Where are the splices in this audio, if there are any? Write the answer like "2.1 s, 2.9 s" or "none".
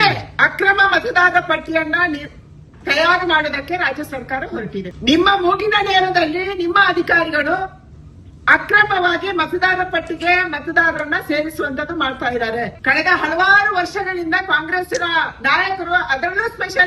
4.9 s, 12.8 s